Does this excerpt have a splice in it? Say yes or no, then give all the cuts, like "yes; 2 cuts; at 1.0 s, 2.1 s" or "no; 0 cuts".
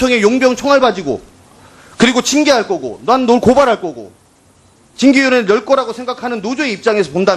no; 0 cuts